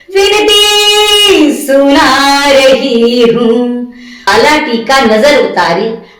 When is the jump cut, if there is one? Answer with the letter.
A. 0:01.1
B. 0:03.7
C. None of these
B